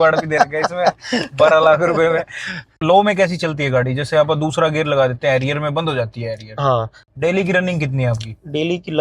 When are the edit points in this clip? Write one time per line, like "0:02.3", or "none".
0:02.8
0:07.0